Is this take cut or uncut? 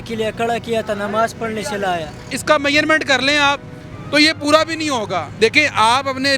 cut